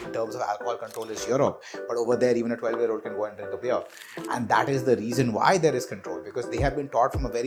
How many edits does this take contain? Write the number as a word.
zero